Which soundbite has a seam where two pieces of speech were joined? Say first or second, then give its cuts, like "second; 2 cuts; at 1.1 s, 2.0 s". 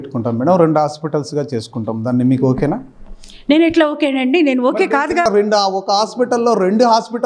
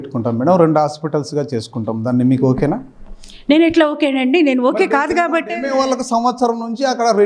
first; 1 cut; at 5.2 s